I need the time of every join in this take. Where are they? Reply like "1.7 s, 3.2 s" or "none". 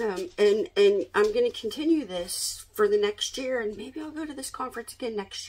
none